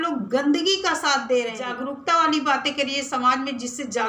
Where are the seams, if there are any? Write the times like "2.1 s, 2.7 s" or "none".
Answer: 1.7 s